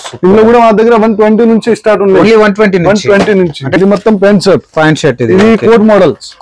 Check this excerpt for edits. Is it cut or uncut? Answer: cut